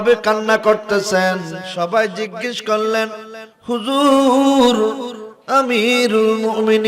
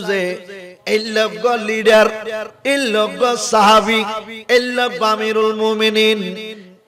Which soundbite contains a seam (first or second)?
first